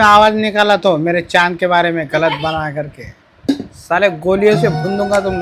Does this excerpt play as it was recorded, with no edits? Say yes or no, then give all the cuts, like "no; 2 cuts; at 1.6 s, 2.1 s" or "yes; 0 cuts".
yes; 0 cuts